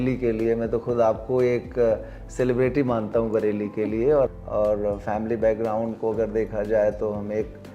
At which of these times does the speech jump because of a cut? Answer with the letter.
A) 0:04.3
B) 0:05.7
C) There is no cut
A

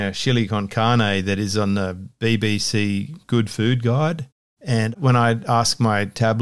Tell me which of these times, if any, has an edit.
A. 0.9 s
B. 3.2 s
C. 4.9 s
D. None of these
C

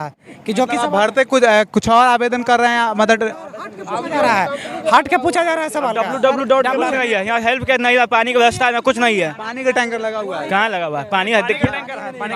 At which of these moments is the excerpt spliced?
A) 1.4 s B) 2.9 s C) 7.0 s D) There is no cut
C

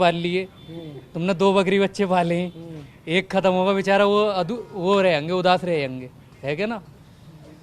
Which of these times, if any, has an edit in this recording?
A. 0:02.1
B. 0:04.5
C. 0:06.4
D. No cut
D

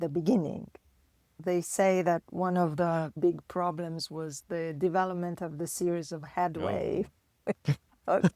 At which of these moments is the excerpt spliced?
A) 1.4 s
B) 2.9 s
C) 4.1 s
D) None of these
A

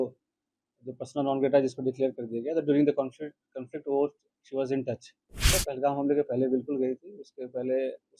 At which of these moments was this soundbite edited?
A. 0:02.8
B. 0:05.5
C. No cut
B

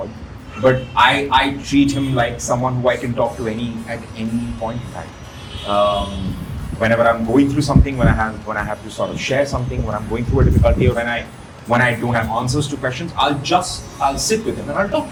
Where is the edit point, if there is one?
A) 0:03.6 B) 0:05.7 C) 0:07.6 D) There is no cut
D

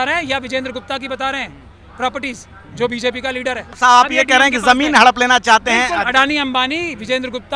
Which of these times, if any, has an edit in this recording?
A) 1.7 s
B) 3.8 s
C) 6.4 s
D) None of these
B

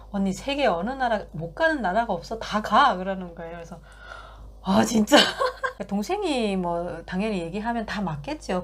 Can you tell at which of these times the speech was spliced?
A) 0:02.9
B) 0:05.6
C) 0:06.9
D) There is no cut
B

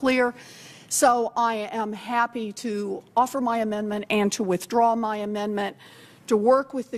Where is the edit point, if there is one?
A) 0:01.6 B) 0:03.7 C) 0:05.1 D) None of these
B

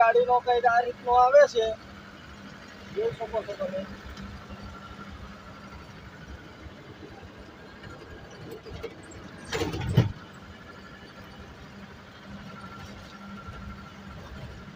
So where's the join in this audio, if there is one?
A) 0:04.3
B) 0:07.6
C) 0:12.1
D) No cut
D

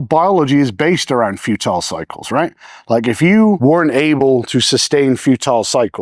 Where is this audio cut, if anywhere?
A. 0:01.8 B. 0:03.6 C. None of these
B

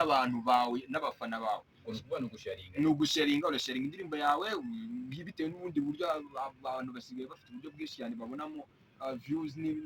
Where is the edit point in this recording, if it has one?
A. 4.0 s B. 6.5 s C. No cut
A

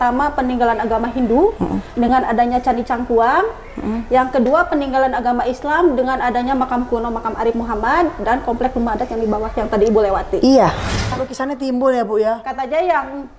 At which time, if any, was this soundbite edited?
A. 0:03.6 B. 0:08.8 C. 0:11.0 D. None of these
C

